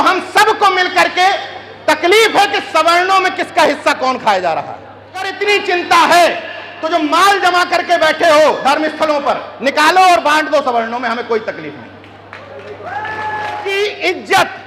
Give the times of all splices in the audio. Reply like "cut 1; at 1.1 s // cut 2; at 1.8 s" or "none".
cut 1; at 5.3 s // cut 2; at 13.7 s